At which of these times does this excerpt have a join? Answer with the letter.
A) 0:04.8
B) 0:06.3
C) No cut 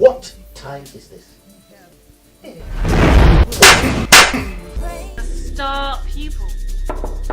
A